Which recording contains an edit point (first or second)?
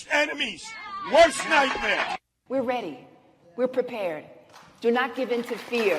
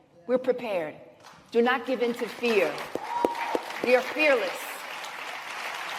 first